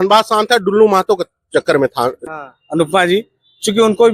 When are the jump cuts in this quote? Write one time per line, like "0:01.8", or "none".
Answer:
0:02.3